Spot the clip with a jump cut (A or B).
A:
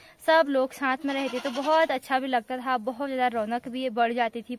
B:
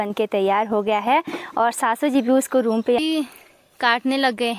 B